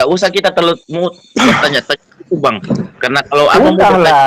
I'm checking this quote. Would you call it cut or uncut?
uncut